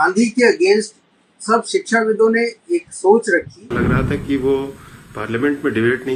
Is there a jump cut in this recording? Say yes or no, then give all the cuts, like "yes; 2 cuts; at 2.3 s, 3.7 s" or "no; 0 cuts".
yes; 1 cut; at 3.6 s